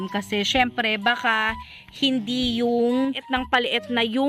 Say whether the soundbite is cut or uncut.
cut